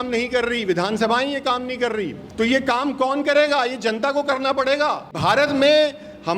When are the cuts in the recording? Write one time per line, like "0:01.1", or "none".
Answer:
0:02.2
0:05.2